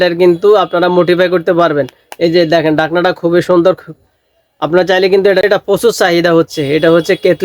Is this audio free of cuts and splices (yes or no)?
no